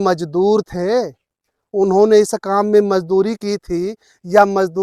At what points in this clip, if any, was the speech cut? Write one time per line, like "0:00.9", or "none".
none